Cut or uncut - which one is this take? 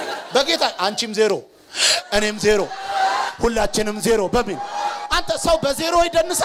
uncut